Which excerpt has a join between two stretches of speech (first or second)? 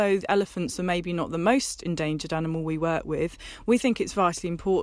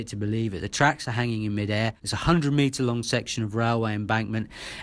second